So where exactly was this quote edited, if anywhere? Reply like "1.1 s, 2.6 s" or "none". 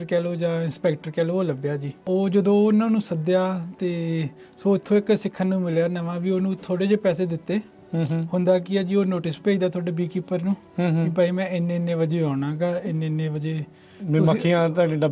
1.9 s

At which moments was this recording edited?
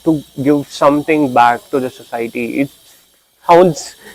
none

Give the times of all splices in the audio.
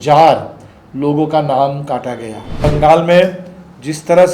2.6 s

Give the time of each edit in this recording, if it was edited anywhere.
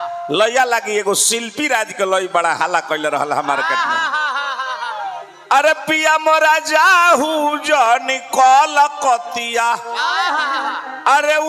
none

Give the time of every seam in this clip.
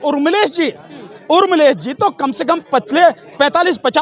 none

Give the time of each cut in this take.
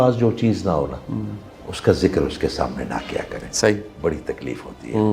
none

